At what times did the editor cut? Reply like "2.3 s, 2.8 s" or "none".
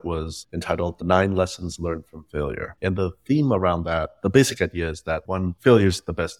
5.3 s

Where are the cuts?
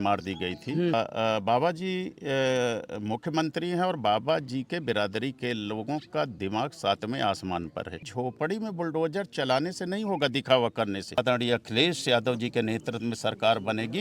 0.9 s, 8.1 s, 11.2 s

